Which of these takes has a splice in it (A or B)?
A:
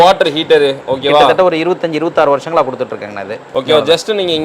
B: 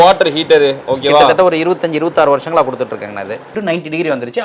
B